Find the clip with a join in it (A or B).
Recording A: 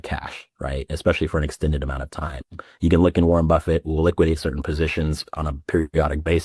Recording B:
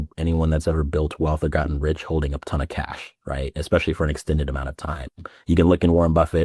A